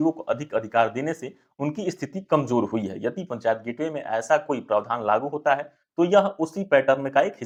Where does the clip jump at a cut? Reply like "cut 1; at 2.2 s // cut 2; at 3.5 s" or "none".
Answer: none